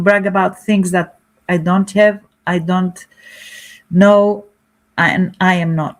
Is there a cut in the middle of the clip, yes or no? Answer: no